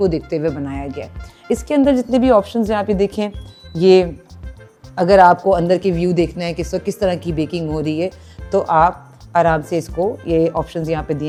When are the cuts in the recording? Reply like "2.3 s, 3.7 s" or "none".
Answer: none